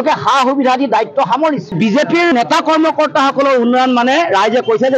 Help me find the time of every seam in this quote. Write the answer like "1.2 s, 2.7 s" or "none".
1.7 s